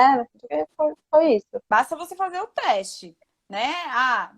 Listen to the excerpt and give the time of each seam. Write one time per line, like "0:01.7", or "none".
0:01.6